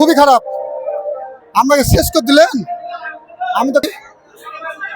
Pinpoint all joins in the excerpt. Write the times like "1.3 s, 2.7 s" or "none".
3.8 s

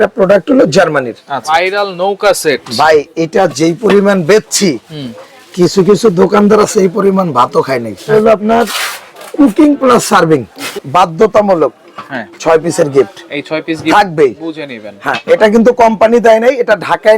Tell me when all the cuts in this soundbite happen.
1.4 s, 8.1 s, 10.7 s

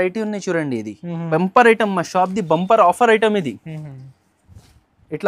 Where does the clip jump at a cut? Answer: 1.2 s

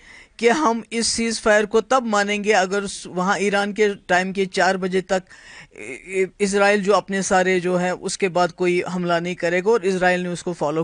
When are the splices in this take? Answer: none

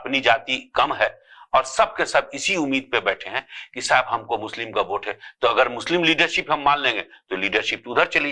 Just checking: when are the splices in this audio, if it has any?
none

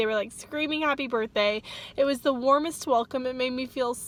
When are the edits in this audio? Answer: none

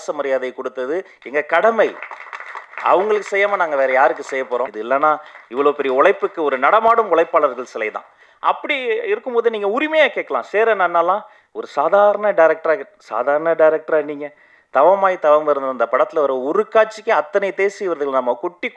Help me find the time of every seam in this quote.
4.8 s

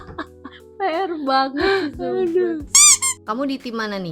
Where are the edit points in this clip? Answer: 2.6 s

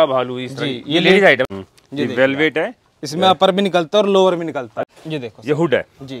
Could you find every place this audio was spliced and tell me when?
1.5 s, 4.8 s

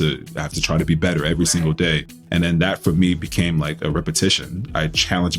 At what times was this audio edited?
2.1 s

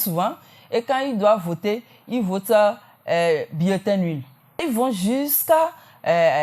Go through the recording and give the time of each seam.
4.6 s

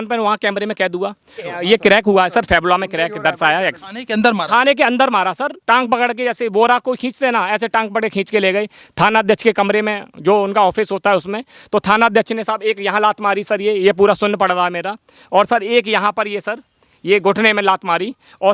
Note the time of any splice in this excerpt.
1.5 s, 3.8 s, 5.5 s

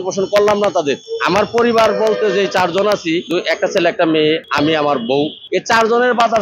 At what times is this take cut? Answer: 1.1 s, 3.3 s, 4.5 s, 5.4 s

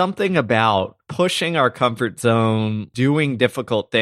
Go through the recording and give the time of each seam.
1.0 s, 2.9 s

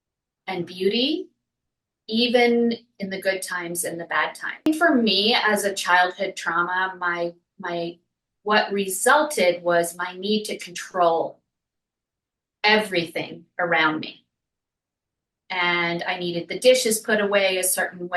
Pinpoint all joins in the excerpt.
4.7 s

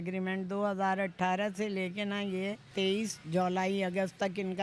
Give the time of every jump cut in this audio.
2.7 s

